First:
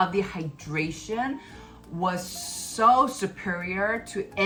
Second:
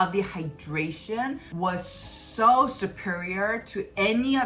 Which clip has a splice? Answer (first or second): second